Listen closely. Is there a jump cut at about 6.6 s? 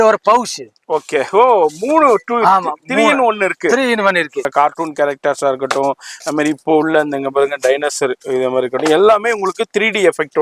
no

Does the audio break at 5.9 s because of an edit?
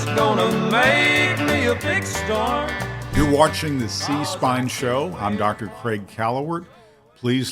no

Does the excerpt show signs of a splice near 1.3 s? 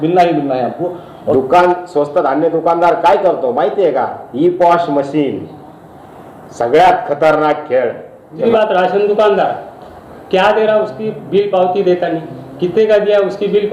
yes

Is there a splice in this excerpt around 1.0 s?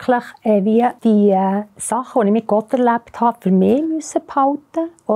yes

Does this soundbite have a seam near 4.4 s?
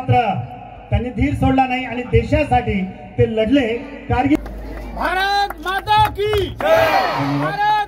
yes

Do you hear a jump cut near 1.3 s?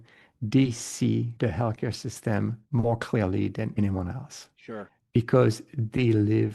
yes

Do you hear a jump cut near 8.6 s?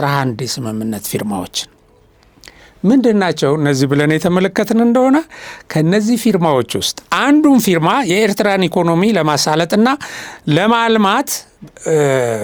no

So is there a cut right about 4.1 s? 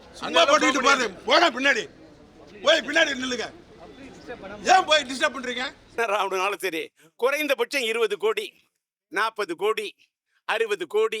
no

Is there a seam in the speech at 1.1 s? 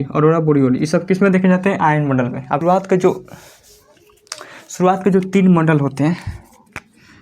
no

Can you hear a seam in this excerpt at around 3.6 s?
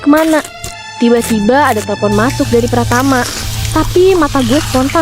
yes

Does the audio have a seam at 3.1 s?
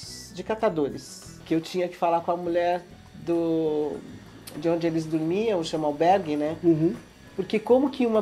no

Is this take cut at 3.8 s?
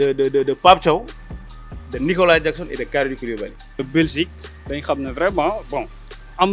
yes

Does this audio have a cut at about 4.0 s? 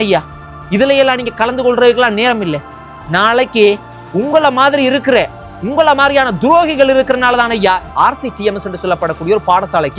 no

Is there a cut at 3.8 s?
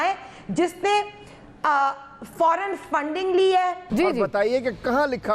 yes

